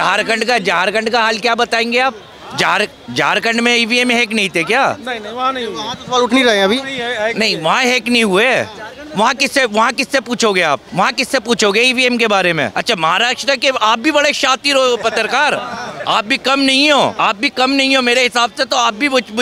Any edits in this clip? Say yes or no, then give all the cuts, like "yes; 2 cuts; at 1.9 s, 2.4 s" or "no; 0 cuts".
yes; 3 cuts; at 10.9 s, 12.8 s, 17.2 s